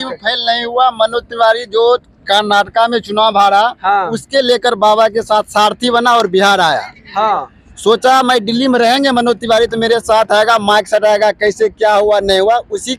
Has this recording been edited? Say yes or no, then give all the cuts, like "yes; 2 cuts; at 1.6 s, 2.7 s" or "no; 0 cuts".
no; 0 cuts